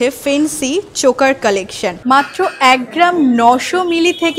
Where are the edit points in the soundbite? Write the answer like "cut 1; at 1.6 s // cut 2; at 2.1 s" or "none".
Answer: cut 1; at 2.0 s